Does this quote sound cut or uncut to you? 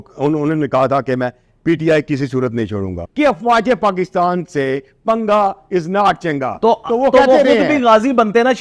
cut